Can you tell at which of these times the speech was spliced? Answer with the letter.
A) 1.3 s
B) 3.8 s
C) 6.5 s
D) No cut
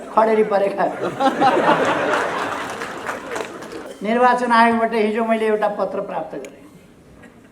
B